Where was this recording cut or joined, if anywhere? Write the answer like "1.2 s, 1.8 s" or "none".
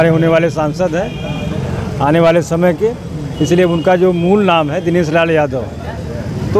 none